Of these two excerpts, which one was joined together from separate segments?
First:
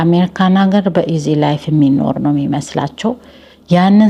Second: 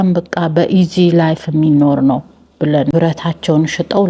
second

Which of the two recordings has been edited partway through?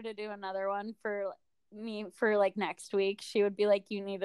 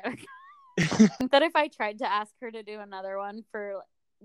second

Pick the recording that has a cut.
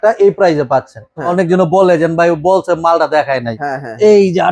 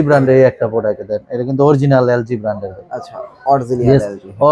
first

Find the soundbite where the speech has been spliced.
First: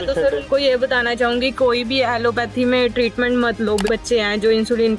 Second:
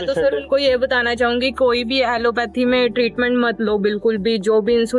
first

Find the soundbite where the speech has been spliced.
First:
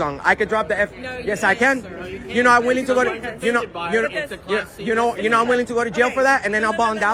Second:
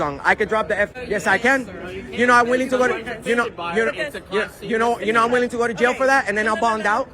second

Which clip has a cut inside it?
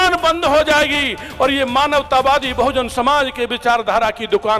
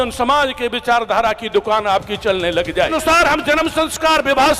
second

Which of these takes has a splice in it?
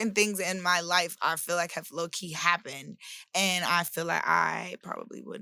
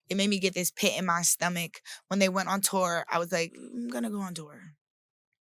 second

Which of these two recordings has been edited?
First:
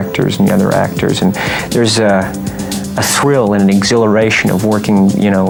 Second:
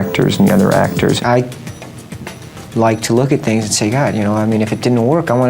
second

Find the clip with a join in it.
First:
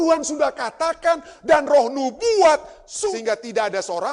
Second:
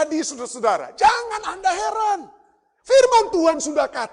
first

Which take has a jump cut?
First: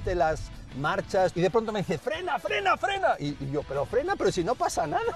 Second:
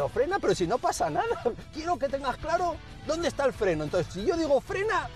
first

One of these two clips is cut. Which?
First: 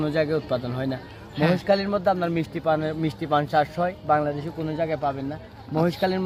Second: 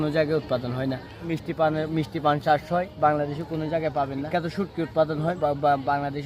second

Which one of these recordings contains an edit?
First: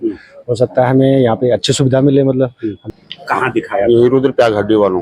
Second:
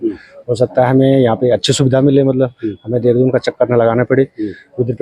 first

